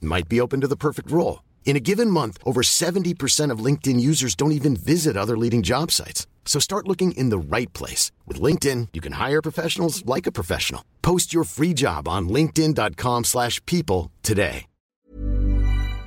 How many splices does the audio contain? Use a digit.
1